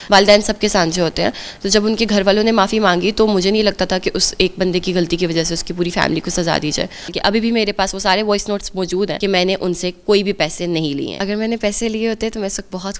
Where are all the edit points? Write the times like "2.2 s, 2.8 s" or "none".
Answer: 7.1 s, 9.1 s, 11.2 s